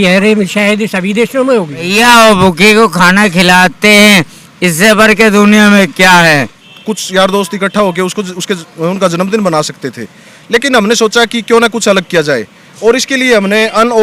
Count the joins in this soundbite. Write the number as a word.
two